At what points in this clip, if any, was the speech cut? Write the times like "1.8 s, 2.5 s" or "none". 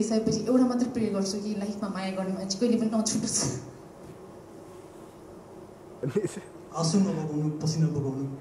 6.0 s